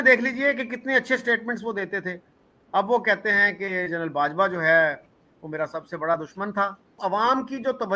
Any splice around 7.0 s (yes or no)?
yes